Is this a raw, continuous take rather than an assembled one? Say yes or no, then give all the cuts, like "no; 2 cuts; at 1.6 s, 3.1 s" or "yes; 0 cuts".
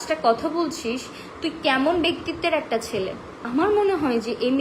no; 1 cut; at 3.4 s